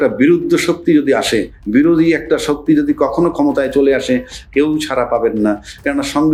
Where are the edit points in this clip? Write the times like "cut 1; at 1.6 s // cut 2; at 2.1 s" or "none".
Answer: none